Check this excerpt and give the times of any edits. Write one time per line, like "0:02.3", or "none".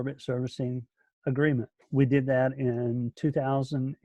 0:01.8